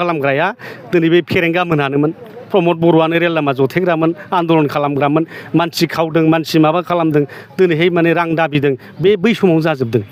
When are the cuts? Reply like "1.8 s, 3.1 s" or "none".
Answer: none